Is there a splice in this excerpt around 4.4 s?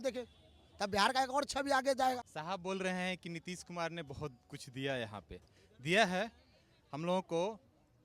no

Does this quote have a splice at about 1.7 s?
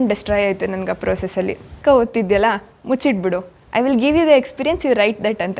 yes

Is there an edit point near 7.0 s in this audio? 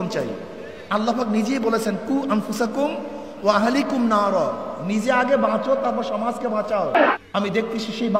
yes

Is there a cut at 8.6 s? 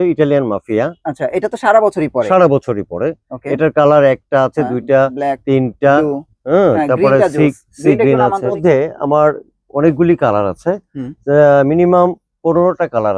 yes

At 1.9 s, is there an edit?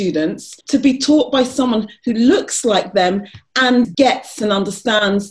no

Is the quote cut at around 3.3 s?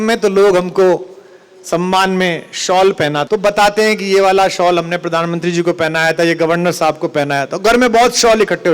yes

